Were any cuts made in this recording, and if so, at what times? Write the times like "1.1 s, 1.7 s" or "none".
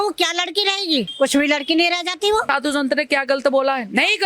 1.1 s, 2.5 s